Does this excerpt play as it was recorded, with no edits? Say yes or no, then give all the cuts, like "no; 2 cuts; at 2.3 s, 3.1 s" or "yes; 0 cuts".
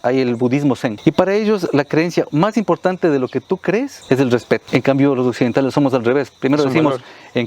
no; 3 cuts; at 1.0 s, 4.0 s, 4.6 s